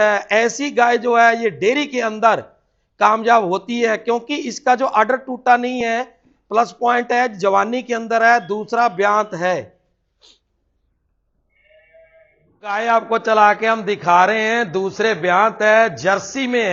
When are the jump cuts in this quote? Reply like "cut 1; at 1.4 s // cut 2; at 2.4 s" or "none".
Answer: cut 1; at 12.7 s